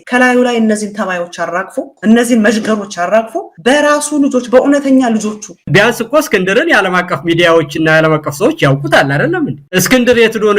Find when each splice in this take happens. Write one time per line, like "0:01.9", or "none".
0:05.6
0:09.6